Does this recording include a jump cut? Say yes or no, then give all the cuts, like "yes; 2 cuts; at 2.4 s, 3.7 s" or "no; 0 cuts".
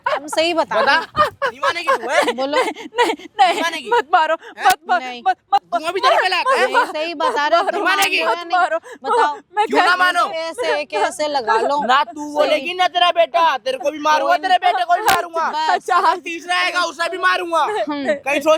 no; 0 cuts